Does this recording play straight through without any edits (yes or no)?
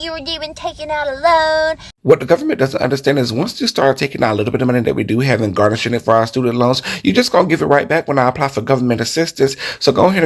no